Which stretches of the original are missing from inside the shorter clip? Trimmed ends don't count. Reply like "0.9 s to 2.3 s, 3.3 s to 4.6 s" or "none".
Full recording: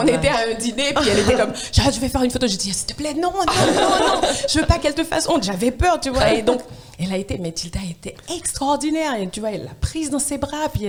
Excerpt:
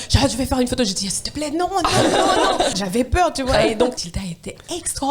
4.4 s to 5.4 s, 6.8 s to 7.7 s